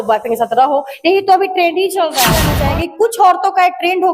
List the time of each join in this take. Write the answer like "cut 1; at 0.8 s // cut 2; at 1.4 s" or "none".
cut 1; at 2.5 s